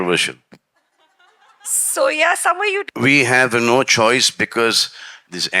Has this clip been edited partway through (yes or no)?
yes